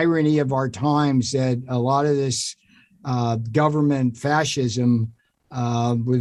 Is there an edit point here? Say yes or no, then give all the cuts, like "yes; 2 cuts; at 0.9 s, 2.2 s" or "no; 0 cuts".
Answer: no; 0 cuts